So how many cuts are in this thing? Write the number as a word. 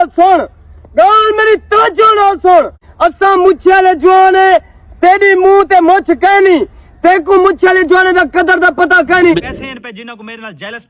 one